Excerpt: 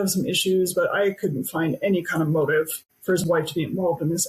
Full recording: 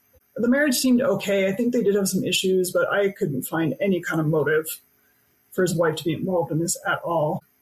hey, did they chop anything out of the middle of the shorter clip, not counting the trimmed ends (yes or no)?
yes